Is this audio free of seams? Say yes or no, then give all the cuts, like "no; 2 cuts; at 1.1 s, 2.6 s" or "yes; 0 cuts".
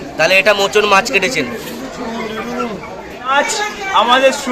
no; 1 cut; at 3.3 s